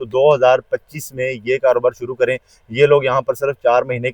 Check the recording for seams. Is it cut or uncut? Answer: uncut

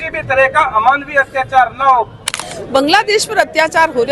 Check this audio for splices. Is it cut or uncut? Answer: cut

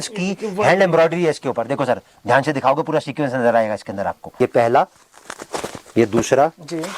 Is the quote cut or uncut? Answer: cut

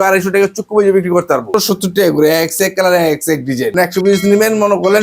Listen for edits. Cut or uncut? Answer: cut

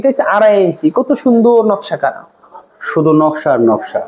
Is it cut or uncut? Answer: uncut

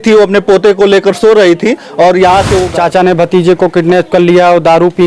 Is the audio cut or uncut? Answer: cut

